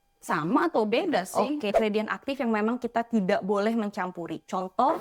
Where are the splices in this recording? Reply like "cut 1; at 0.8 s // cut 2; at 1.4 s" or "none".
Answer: cut 1; at 1.7 s

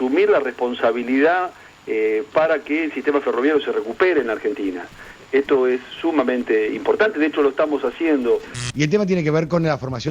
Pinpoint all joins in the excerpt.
cut 1; at 8.5 s

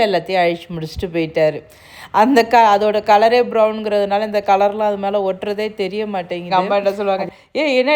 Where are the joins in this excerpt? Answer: cut 1; at 6.5 s

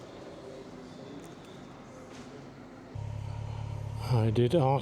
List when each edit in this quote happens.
cut 1; at 3.0 s

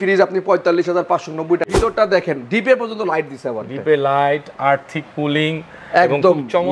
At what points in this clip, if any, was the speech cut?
cut 1; at 1.7 s

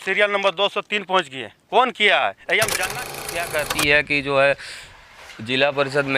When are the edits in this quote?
cut 1; at 3.1 s

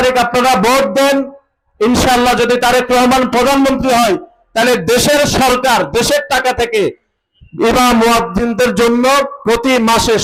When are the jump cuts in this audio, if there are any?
none

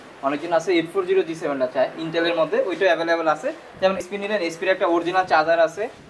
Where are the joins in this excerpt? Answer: cut 1; at 4.0 s

